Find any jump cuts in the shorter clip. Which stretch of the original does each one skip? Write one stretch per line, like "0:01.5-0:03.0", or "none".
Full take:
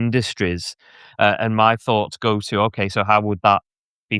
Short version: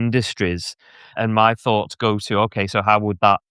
0:01.1-0:01.4